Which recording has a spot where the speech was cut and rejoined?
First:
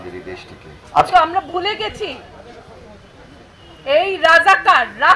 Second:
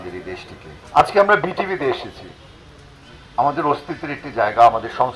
first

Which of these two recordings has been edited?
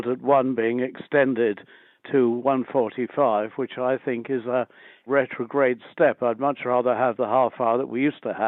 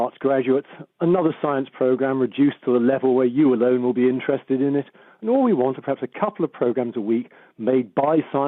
first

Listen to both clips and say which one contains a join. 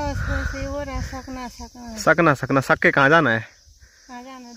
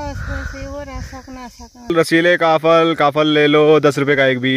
second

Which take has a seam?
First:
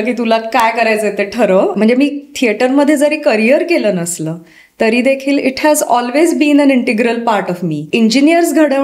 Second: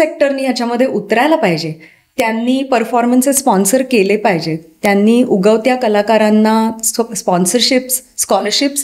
first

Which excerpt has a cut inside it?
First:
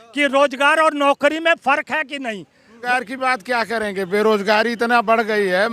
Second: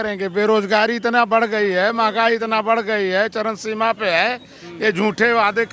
first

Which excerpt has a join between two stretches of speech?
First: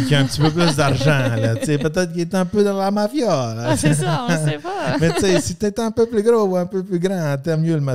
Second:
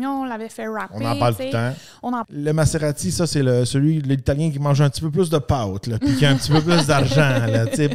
second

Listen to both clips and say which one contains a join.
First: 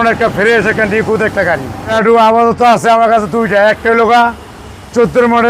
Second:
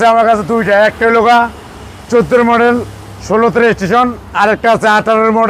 first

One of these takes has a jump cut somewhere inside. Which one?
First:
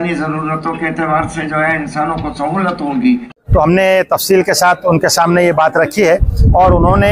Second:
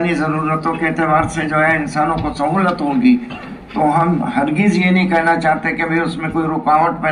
first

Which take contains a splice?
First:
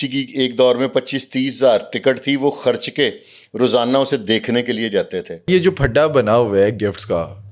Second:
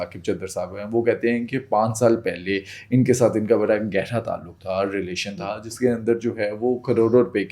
first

